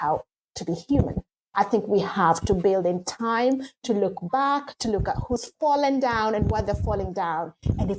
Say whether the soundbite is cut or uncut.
uncut